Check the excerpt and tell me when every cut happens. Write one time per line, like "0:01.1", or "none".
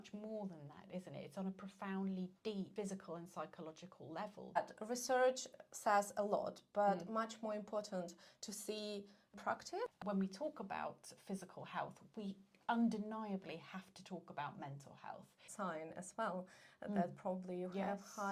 0:02.7
0:04.6
0:09.4
0:15.4